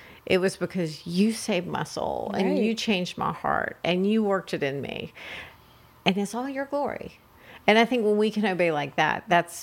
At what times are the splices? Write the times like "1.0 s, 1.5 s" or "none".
none